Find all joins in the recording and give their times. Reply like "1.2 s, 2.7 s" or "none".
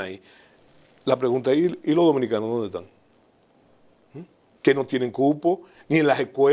none